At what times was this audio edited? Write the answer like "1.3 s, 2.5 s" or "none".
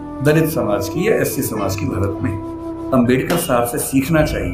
2.8 s